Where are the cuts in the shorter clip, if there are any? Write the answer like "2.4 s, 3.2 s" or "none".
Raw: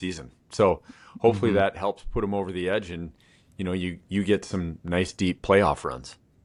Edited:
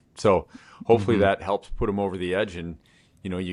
none